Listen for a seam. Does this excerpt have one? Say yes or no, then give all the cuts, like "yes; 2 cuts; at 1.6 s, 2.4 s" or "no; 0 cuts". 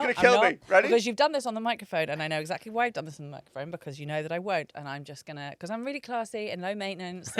no; 0 cuts